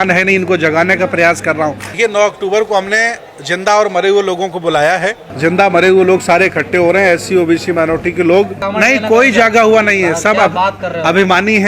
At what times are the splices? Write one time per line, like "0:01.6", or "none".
0:01.9
0:05.2
0:08.6